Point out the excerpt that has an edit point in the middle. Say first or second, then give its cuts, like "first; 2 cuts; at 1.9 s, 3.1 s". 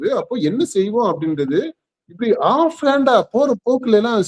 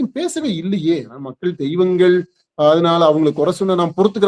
second; 1 cut; at 1.2 s